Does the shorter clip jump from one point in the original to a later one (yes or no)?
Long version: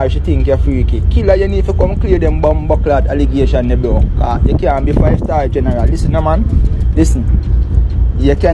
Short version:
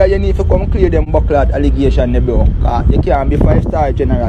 yes